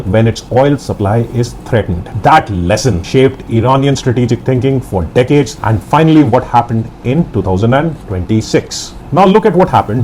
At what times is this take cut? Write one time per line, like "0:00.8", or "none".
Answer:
none